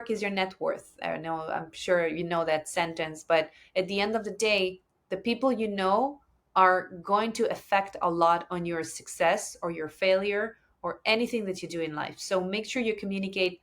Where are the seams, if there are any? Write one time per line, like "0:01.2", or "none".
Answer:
none